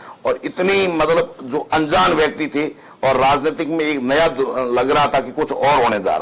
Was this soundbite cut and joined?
no; 0 cuts

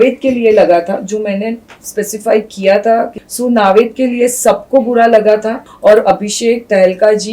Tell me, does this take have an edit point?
yes; 2 cuts; at 3.2 s, 5.7 s

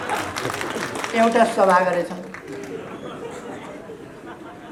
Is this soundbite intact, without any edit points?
yes; 0 cuts

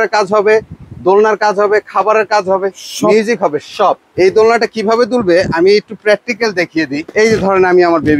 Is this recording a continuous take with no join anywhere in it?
no; 2 cuts; at 4.1 s, 7.2 s

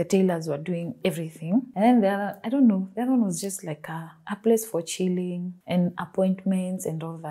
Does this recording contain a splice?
no; 0 cuts

